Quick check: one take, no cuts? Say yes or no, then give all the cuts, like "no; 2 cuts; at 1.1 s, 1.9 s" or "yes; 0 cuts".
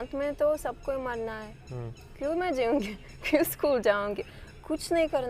yes; 0 cuts